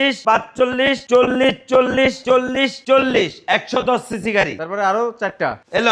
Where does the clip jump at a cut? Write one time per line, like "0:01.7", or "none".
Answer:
none